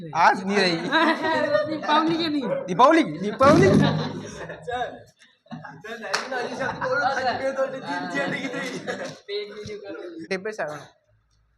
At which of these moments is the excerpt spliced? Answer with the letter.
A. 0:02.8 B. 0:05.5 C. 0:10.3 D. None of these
C